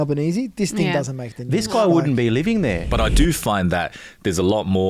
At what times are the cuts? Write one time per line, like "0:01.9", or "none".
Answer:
0:02.8